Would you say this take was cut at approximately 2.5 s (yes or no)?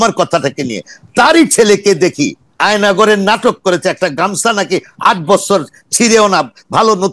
yes